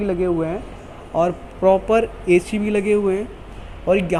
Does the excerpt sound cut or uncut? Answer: uncut